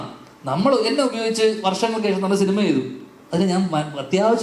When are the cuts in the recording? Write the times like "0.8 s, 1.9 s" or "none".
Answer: none